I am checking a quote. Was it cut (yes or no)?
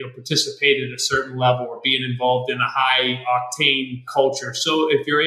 yes